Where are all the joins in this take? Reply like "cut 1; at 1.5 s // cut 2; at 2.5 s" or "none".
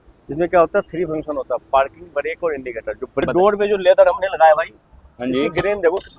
cut 1; at 3.2 s